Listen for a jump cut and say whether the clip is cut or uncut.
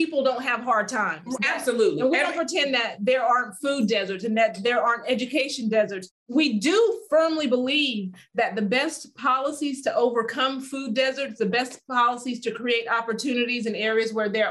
uncut